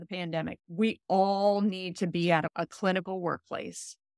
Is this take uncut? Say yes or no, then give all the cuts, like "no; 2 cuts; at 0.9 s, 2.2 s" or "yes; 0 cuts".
no; 1 cut; at 2.5 s